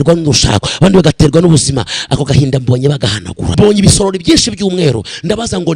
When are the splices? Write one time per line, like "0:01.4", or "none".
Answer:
0:03.5